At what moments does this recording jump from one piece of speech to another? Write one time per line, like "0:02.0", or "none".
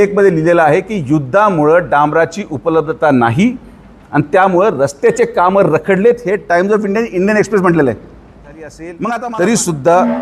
0:08.9